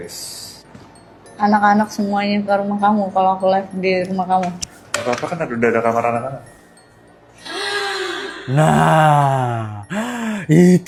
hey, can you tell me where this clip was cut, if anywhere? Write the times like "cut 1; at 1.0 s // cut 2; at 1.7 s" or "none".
none